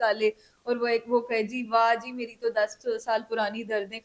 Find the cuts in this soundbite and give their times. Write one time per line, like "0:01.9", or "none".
none